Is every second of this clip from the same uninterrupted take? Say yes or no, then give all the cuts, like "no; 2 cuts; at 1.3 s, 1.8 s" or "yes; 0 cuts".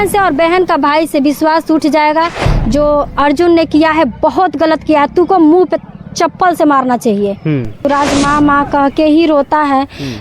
no; 1 cut; at 7.8 s